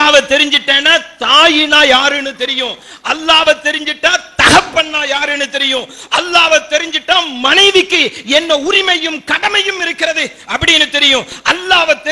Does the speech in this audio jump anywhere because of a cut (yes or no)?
no